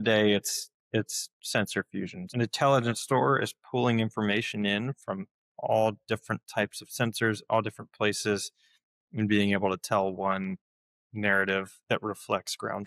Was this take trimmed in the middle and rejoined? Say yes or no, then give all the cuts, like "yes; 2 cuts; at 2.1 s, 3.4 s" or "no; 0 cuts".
yes; 1 cut; at 2.2 s